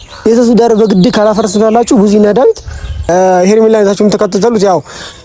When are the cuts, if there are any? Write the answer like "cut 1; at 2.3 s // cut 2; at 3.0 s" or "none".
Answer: cut 1; at 3.1 s

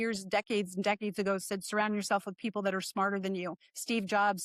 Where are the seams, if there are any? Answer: none

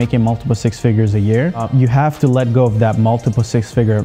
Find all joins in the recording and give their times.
none

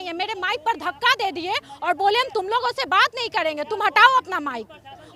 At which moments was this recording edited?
none

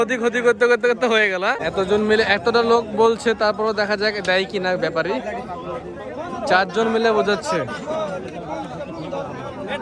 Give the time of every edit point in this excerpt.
cut 1; at 1.6 s

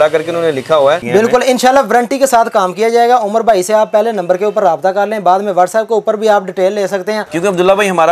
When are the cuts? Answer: cut 1; at 1.0 s // cut 2; at 7.3 s

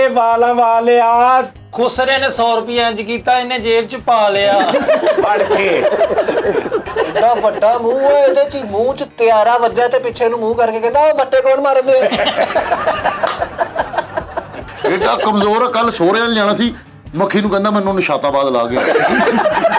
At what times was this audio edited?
cut 1; at 6.9 s // cut 2; at 14.6 s

